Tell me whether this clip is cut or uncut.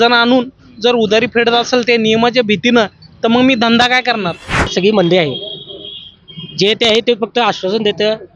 cut